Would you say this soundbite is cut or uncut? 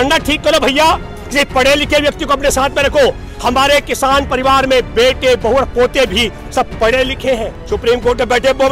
cut